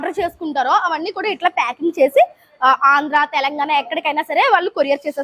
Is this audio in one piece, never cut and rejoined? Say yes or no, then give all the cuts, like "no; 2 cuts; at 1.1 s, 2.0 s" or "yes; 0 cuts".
yes; 0 cuts